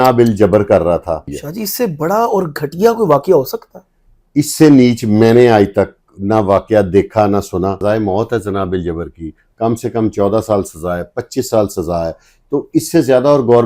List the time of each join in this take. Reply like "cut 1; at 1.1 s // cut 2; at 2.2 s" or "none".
cut 1; at 1.4 s // cut 2; at 7.8 s